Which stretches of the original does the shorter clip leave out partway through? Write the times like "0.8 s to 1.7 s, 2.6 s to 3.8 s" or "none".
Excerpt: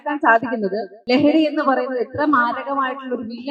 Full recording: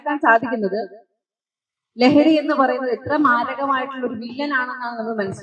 0.9 s to 1.8 s